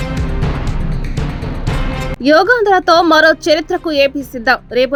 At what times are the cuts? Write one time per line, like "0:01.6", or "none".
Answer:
none